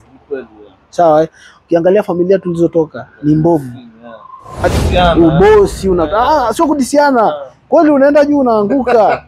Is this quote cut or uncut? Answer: cut